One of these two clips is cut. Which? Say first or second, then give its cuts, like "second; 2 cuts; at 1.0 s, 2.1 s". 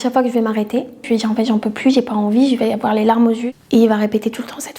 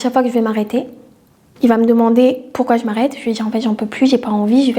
first; 2 cuts; at 1.0 s, 3.5 s